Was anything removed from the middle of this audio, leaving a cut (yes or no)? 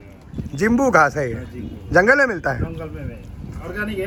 no